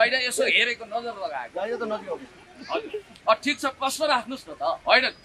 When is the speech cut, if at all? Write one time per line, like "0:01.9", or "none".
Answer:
none